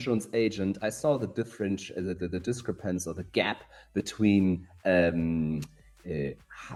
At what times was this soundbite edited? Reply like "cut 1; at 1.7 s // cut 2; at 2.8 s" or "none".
none